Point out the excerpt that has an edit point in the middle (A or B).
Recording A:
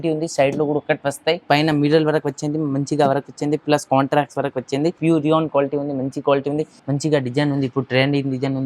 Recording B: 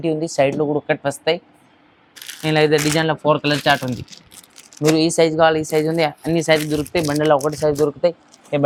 A